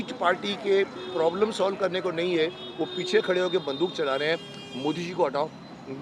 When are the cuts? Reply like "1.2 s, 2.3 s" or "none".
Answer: none